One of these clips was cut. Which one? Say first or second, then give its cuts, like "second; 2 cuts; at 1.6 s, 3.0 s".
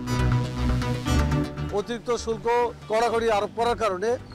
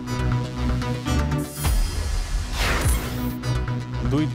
first; 1 cut; at 1.3 s